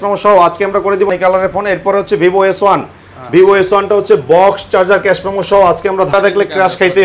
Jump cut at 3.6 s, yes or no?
no